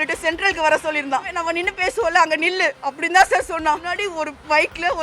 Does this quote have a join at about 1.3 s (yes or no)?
yes